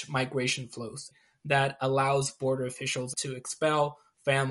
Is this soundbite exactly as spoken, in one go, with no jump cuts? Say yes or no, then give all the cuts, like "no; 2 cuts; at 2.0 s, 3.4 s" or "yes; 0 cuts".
no; 2 cuts; at 1.2 s, 3.1 s